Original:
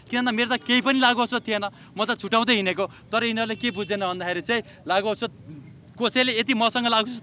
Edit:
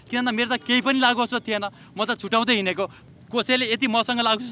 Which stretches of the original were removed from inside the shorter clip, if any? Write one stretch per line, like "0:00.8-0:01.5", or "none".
0:03.0-0:05.7

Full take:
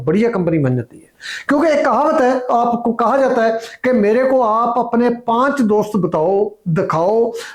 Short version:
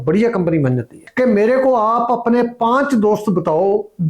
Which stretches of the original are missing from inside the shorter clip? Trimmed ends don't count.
0:01.0-0:03.7

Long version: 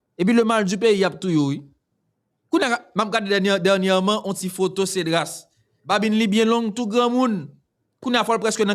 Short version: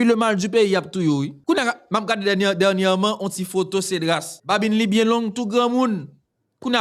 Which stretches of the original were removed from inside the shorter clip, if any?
0:01.6-0:02.4
0:05.4-0:05.7

